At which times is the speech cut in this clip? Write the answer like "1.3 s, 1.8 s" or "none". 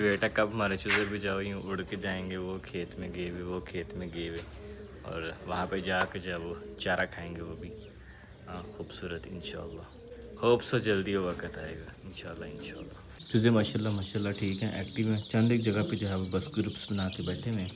none

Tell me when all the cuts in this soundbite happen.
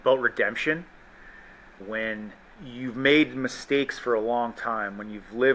1.8 s, 2.6 s

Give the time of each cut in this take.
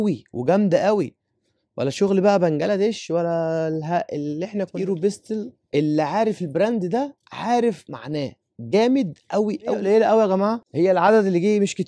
4.7 s, 9.8 s

